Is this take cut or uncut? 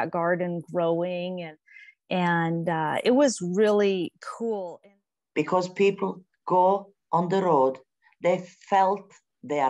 cut